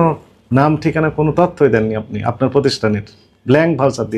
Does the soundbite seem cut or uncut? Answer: uncut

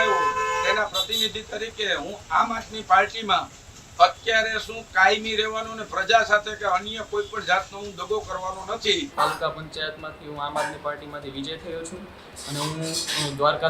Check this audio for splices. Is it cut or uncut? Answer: cut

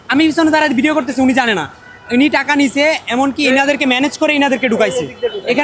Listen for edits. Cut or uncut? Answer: uncut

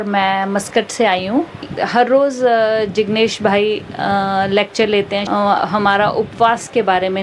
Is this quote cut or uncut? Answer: cut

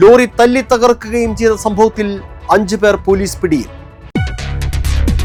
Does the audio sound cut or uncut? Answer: uncut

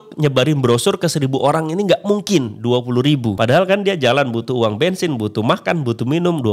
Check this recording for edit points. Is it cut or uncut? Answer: cut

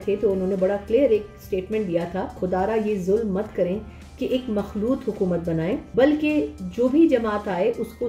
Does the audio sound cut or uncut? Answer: cut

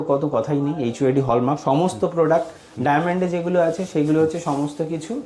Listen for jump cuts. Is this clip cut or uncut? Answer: uncut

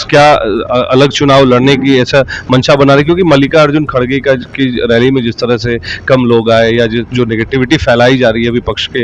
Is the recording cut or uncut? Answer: uncut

